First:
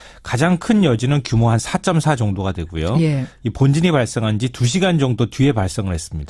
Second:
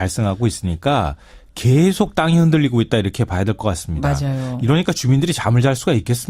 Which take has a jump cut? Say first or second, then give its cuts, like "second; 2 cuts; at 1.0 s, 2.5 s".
second; 1 cut; at 4.8 s